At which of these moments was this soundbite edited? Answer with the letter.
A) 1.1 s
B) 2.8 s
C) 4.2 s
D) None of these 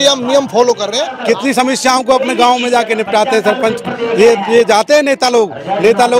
A